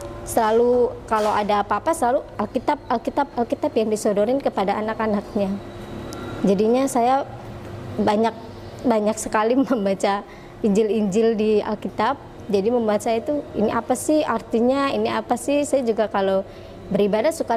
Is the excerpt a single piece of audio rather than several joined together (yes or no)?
yes